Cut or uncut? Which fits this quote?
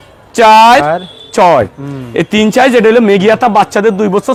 uncut